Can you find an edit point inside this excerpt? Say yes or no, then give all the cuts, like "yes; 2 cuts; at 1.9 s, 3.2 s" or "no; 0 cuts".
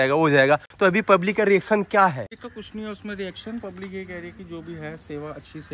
yes; 1 cut; at 2.4 s